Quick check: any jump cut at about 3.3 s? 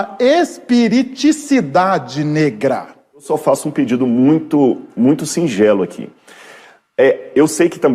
yes; 1 cut; at 3.3 s

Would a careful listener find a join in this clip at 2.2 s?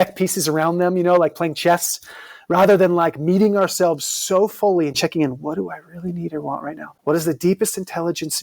no; 1 cut; at 6.9 s

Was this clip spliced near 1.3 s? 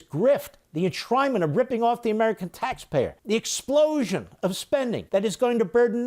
no; 2 cuts; at 3.2 s, 5.0 s

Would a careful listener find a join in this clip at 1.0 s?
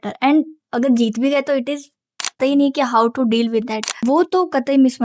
no; 2 cuts; at 2.4 s, 3.8 s

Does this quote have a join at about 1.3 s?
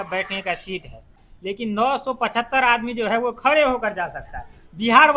yes; 1 cut; at 1.3 s

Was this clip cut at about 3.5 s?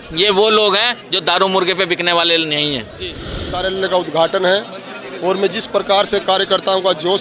yes; 1 cut; at 3.5 s

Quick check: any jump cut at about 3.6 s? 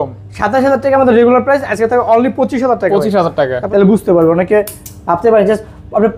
yes; 1 cut; at 3.6 s

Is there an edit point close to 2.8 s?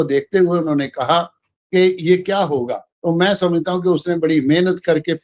yes; 1 cut; at 2.8 s

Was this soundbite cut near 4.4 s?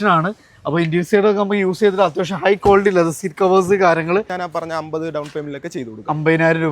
yes; 1 cut; at 4.4 s

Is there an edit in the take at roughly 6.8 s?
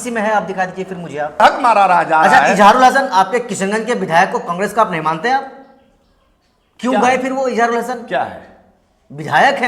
no; 1 cut; at 1.4 s

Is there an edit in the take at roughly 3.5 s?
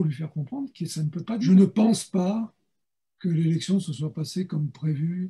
no; 1 cut; at 1.5 s

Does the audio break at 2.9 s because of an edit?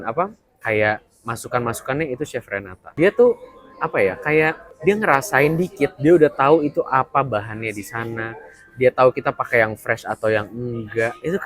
yes; 2 cuts; at 2.9 s, 4.7 s

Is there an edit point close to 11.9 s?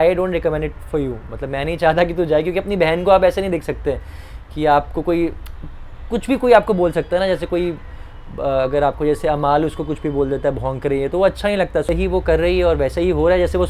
yes; 1 cut; at 11.9 s

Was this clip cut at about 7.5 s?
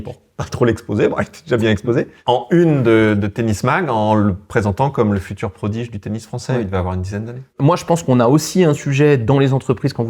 yes; 2 cuts; at 2.1 s, 7.5 s

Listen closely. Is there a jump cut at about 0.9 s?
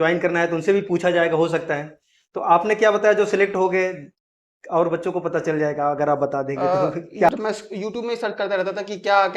no; 1 cut; at 7.3 s

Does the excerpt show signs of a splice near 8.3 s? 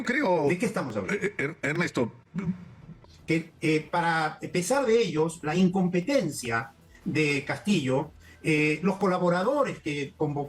no; 1 cut; at 3.0 s

